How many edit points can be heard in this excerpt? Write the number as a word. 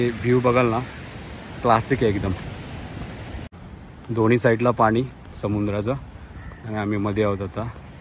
one